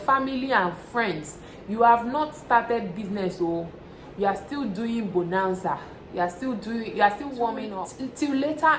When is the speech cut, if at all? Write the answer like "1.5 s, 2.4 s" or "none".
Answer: 7.8 s